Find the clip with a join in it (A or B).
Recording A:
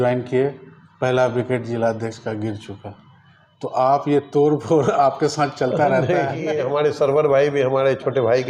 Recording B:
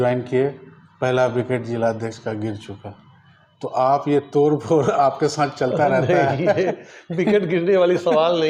A